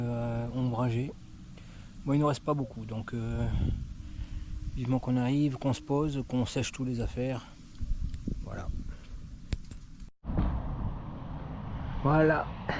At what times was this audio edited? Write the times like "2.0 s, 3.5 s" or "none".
none